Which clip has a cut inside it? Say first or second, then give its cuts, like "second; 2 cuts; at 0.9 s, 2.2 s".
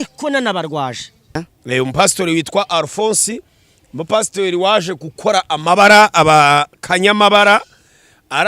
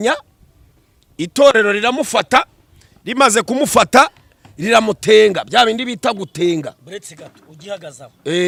first; 1 cut; at 1.5 s